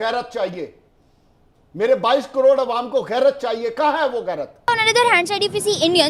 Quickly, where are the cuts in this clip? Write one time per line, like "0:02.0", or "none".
0:04.9

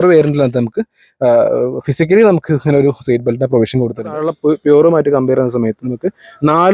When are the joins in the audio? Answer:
0:04.1

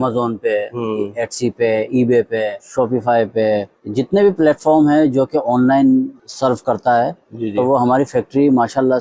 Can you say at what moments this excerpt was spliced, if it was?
0:02.6
0:03.8
0:06.2

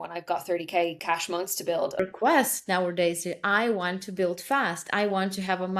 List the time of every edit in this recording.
0:01.0
0:01.9

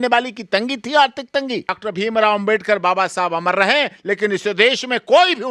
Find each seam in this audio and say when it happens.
0:01.7

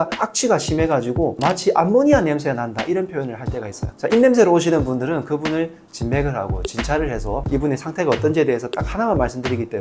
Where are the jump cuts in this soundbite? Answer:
0:03.8

